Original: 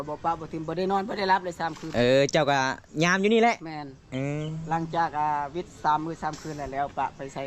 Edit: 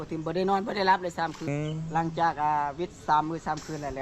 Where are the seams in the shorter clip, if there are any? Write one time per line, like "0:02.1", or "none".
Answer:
0:01.4